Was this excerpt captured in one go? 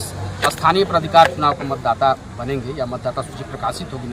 yes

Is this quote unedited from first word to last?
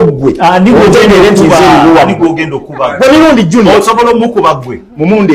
yes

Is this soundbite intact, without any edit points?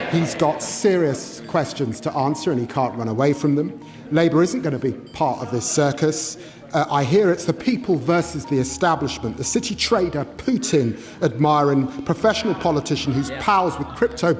yes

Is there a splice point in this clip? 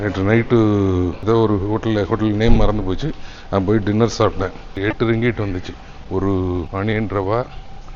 yes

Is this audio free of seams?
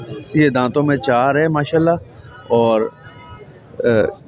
yes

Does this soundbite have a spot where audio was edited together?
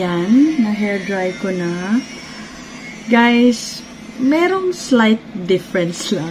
no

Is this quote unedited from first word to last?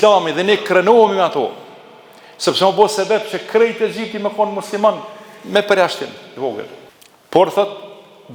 yes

